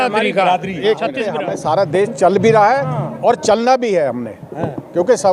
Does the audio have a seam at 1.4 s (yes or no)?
yes